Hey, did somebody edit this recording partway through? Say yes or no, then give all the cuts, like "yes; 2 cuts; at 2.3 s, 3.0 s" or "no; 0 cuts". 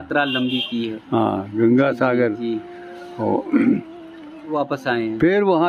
no; 0 cuts